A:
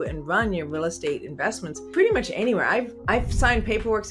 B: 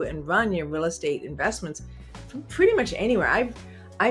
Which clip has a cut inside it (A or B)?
A